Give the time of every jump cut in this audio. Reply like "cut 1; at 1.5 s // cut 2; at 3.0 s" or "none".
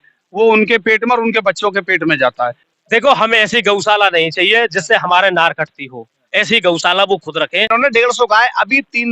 cut 1; at 2.7 s // cut 2; at 7.7 s